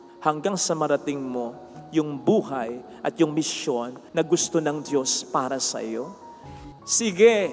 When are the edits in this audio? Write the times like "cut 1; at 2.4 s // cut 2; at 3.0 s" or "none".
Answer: cut 1; at 4.0 s // cut 2; at 6.5 s